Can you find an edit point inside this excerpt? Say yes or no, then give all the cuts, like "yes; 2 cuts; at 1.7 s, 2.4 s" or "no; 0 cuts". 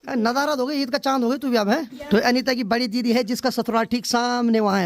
yes; 1 cut; at 1.9 s